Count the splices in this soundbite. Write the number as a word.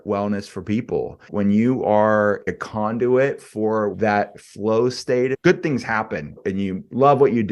five